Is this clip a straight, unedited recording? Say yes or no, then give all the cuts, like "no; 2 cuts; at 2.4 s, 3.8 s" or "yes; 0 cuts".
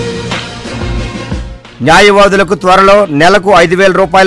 no; 1 cut; at 1.5 s